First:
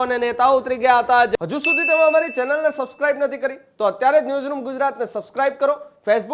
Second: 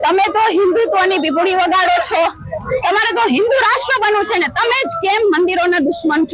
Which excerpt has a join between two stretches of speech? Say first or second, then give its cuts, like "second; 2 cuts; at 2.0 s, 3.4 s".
first; 1 cut; at 1.3 s